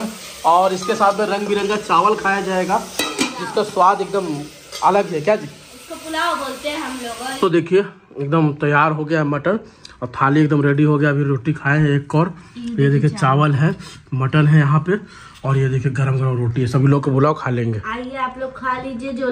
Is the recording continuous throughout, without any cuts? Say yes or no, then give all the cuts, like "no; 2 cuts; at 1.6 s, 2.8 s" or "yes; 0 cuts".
yes; 0 cuts